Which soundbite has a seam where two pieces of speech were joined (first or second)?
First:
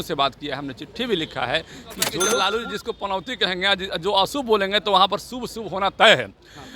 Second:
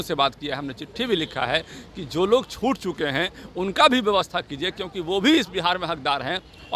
first